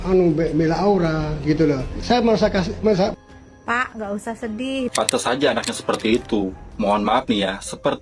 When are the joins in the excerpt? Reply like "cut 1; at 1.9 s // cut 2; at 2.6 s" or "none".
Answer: cut 1; at 4.9 s